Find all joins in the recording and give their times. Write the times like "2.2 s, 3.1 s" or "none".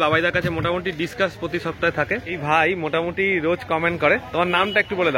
2.3 s